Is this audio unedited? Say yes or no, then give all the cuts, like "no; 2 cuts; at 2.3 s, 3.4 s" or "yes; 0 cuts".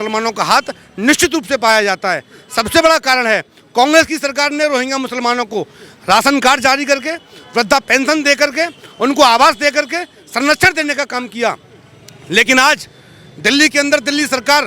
yes; 0 cuts